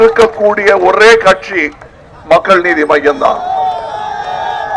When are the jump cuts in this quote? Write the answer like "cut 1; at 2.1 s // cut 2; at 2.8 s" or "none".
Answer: none